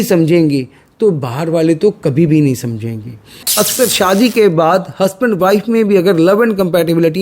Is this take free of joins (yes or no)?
no